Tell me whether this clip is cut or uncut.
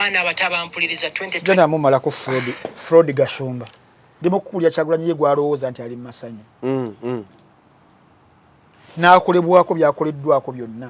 cut